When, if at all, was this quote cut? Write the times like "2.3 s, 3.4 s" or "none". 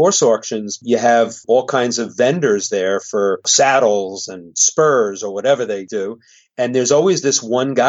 1.4 s